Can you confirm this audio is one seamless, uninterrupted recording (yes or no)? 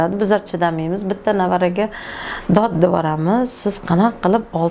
yes